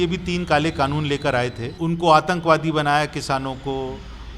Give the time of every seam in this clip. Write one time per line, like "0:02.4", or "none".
0:01.6